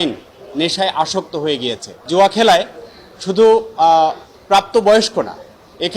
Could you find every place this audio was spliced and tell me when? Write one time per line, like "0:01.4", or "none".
0:02.1